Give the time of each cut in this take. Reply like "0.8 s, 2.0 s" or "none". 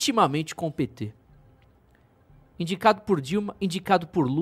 none